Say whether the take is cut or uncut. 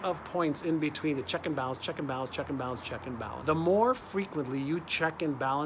cut